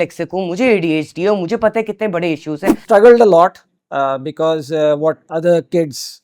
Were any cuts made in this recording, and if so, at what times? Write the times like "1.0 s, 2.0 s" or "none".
2.8 s